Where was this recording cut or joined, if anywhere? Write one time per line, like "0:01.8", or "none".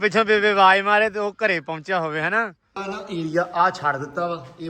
0:02.8